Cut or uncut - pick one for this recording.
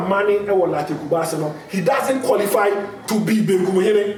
uncut